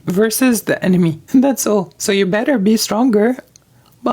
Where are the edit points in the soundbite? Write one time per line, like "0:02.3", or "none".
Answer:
0:01.2